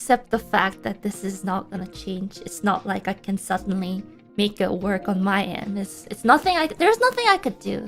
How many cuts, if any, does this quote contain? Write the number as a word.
one